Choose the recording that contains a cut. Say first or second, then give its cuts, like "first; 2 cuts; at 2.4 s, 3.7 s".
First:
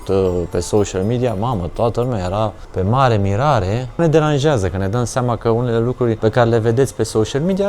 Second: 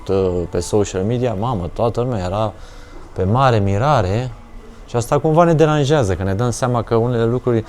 first; 3 cuts; at 2.6 s, 4.0 s, 6.2 s